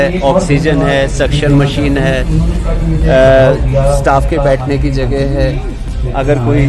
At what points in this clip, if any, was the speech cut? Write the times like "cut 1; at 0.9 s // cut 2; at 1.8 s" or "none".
none